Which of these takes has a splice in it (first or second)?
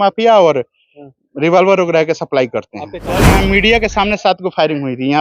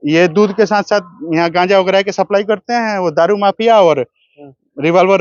first